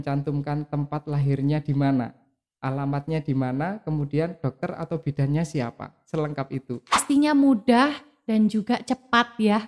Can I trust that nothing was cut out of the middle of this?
no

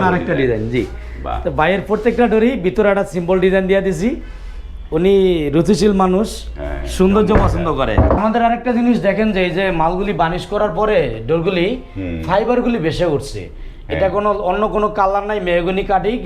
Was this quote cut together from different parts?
yes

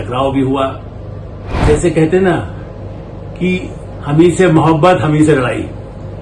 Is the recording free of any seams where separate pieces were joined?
no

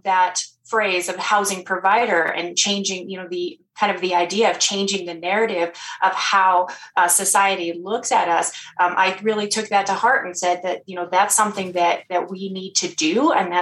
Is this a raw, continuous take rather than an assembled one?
yes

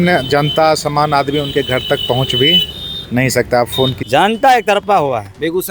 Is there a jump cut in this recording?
yes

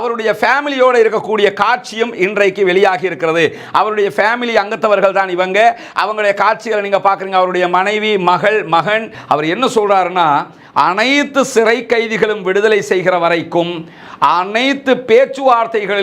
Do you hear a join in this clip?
yes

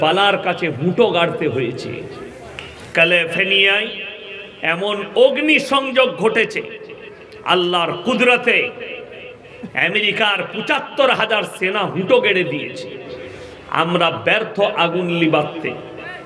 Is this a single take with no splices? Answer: yes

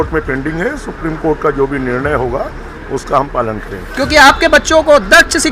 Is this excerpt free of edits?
no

